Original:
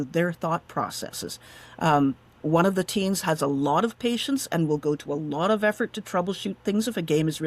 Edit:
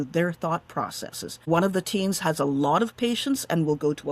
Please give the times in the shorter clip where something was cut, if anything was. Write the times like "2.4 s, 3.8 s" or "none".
1.3 s